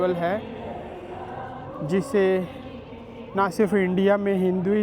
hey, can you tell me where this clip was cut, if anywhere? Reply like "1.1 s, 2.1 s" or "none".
none